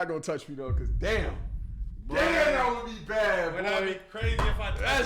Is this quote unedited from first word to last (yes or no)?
yes